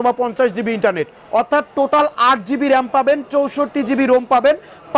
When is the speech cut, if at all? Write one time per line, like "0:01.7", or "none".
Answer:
0:01.2